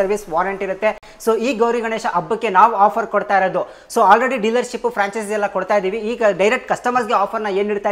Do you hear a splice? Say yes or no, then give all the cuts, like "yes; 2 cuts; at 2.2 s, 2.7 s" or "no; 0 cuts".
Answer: no; 0 cuts